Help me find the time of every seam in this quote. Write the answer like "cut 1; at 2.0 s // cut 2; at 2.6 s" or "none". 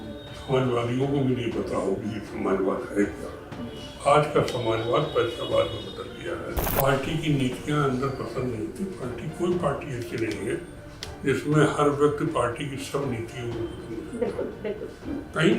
cut 1; at 6.6 s